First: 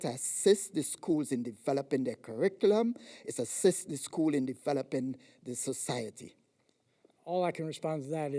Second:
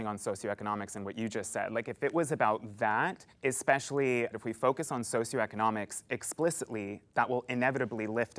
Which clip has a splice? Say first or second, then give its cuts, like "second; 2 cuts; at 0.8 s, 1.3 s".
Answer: second; 2 cuts; at 3.2 s, 4.3 s